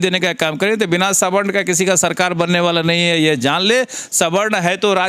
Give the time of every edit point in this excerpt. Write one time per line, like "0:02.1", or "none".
none

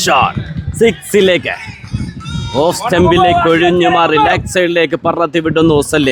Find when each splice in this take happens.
none

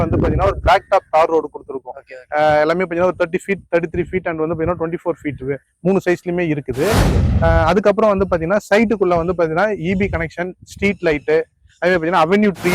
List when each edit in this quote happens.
none

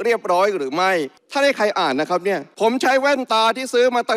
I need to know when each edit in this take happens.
0:01.2
0:02.5

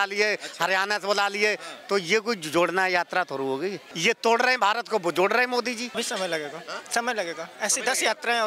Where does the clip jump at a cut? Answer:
0:03.9
0:05.9

